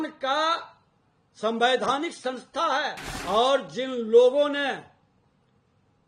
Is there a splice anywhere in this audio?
yes; 1 cut; at 3.1 s

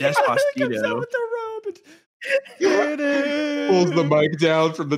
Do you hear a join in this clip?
no; 0 cuts

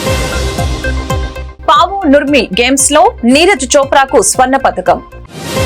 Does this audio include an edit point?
no; 0 cuts

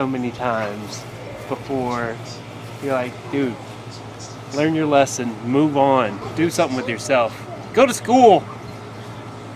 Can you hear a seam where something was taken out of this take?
yes; 1 cut; at 6.2 s

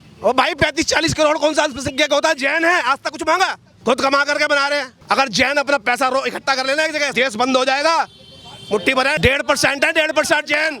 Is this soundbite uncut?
no; 4 cuts; at 3.7 s, 4.9 s, 7.1 s, 9.2 s

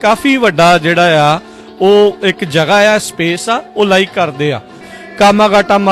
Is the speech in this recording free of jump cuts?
no; 1 cut; at 5.0 s

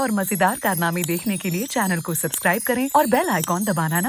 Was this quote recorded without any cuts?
yes; 0 cuts

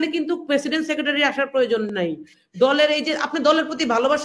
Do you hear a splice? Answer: no; 0 cuts

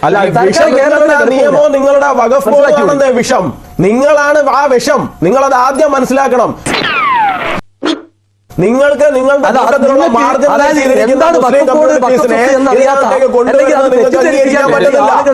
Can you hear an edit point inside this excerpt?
no; 0 cuts

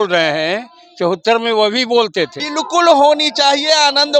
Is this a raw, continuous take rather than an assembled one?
no; 1 cut; at 2.4 s

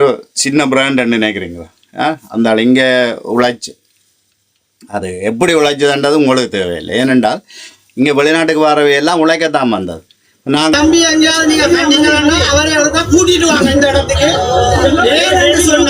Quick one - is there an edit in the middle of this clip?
yes; 1 cut; at 10.8 s

